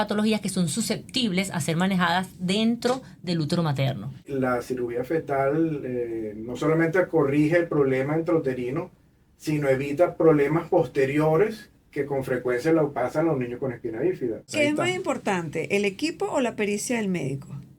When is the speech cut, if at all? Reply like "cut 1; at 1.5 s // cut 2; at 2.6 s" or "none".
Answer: cut 1; at 4.3 s // cut 2; at 14.5 s

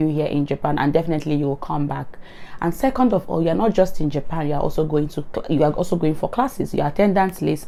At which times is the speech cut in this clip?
none

